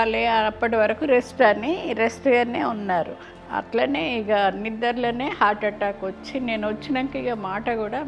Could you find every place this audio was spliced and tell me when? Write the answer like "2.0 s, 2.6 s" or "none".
none